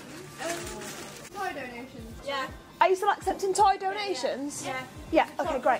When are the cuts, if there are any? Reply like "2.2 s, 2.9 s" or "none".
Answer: 1.3 s